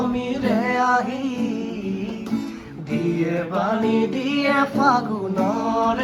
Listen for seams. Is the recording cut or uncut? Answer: uncut